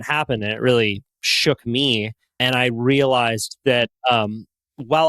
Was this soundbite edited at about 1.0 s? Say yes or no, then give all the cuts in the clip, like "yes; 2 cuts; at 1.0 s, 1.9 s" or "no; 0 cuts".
no; 1 cut; at 2.2 s